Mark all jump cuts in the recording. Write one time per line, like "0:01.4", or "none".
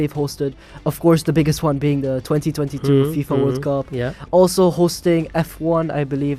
none

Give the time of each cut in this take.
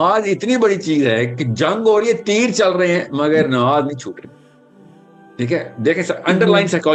none

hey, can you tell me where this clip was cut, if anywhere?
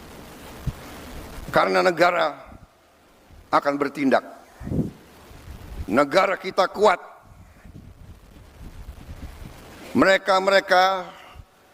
none

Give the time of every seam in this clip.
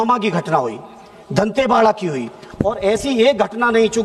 none

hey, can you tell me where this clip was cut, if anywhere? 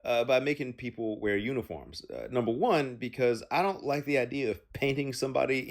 0:04.6

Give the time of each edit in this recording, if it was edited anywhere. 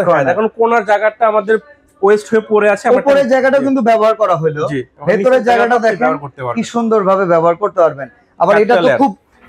none

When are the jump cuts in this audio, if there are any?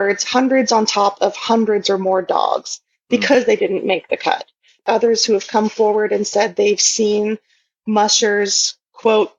0:04.8

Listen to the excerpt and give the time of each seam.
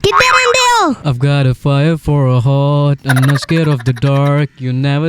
0:01.1

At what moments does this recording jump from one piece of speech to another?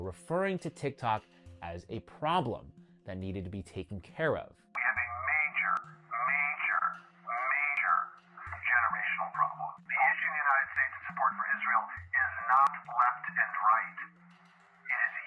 none

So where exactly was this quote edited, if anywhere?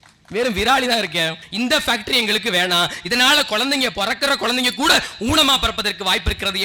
0:01.4

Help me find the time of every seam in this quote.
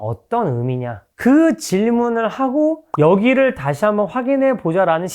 0:01.0

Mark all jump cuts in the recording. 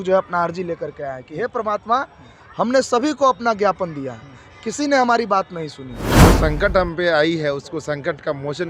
0:06.0

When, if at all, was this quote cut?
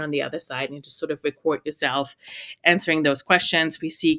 none

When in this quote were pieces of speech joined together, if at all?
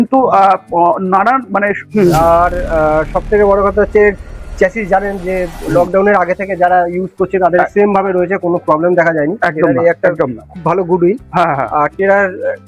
0:01.8

